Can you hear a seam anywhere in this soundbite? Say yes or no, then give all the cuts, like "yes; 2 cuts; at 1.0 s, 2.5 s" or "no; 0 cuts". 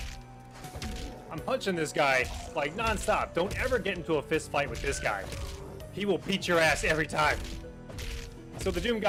no; 0 cuts